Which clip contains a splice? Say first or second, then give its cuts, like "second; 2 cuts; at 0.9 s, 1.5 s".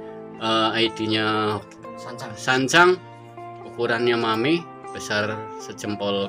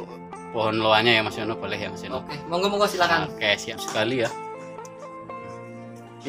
second; 1 cut; at 3.6 s